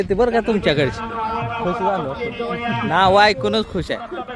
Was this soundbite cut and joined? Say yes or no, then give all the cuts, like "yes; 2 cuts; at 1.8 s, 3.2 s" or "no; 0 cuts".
no; 0 cuts